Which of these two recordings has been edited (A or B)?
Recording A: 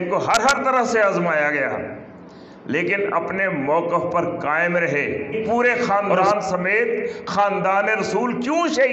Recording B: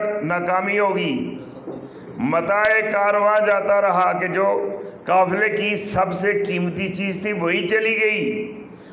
A